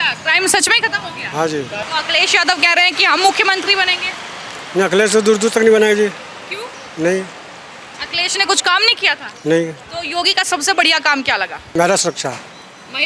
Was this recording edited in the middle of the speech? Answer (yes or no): yes